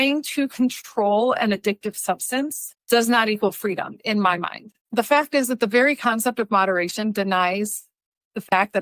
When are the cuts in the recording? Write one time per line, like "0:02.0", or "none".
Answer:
0:04.8